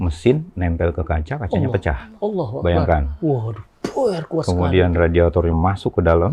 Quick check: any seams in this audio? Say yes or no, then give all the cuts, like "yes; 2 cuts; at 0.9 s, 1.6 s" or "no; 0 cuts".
no; 0 cuts